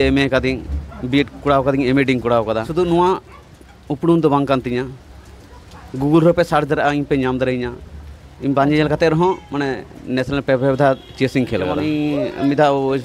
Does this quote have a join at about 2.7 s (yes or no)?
yes